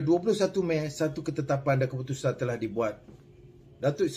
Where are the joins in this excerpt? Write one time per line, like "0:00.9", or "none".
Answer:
none